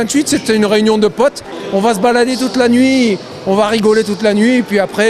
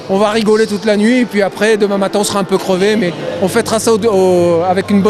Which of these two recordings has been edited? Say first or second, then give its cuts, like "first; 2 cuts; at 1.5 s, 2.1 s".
first; 1 cut; at 1.5 s